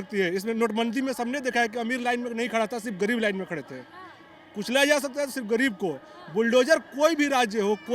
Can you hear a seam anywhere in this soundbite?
no; 0 cuts

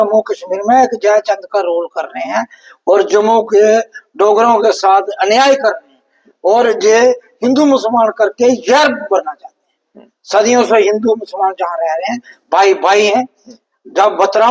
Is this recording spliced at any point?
no; 0 cuts

